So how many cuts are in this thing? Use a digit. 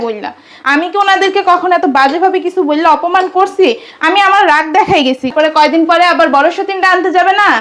1